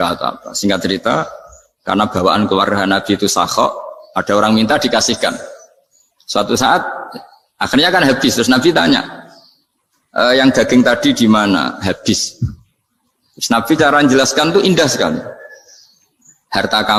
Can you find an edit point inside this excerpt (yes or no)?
no